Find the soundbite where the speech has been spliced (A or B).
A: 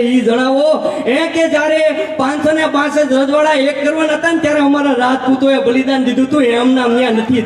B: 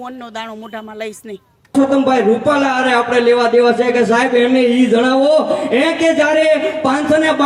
B